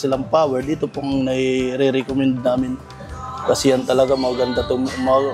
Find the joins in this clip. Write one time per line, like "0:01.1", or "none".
none